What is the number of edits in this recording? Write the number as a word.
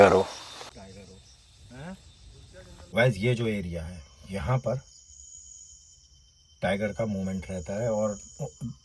one